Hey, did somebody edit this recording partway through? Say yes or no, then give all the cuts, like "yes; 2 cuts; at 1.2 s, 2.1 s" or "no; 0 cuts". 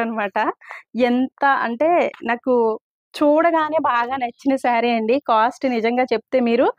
no; 0 cuts